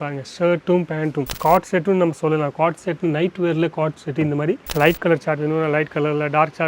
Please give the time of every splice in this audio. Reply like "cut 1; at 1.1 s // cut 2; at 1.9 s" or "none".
cut 1; at 1.3 s // cut 2; at 4.7 s